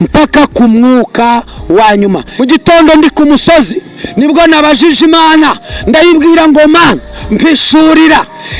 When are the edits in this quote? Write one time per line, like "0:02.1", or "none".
0:02.3